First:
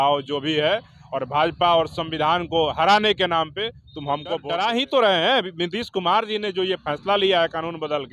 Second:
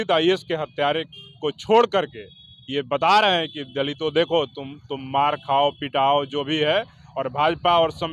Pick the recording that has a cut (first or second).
first